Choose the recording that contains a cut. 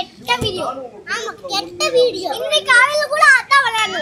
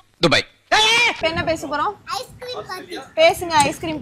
second; 1 cut; at 1.2 s

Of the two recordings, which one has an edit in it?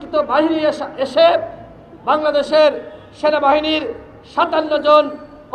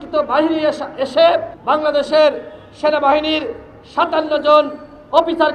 second; 1 cut; at 1.5 s

